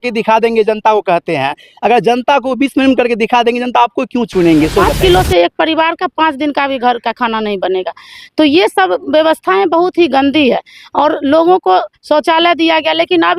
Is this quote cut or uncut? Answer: cut